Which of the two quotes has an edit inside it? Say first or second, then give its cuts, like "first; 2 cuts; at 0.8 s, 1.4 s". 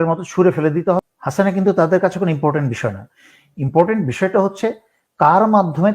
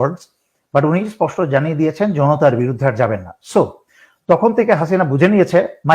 first; 1 cut; at 1.1 s